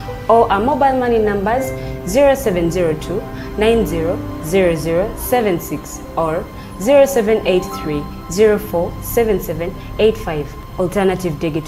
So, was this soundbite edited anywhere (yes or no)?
no